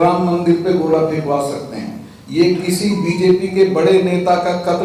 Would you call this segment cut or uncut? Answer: uncut